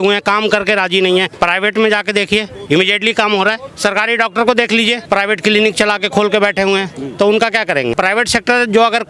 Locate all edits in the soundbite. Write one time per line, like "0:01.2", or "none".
0:01.3
0:03.7
0:05.0
0:07.9